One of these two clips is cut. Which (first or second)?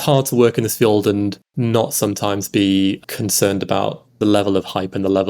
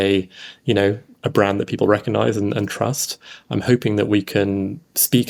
first